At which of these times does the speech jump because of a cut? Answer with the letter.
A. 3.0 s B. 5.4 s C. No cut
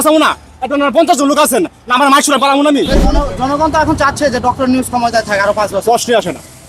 A